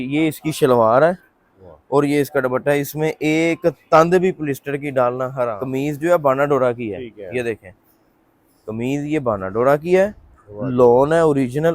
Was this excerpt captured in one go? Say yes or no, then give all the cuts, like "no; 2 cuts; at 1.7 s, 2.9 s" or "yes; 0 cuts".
no; 1 cut; at 5.6 s